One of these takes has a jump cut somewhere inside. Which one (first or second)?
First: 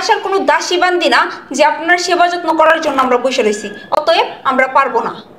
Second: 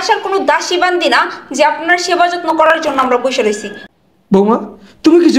second